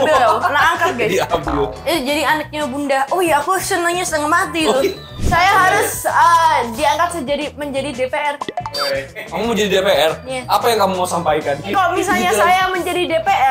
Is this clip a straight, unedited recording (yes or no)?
no